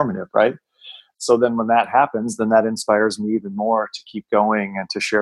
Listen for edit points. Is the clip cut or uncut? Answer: cut